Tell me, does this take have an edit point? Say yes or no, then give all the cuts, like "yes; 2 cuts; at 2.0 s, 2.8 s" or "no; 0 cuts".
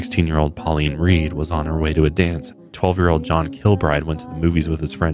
yes; 1 cut; at 2.7 s